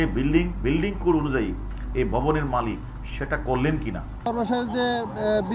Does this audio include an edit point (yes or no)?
yes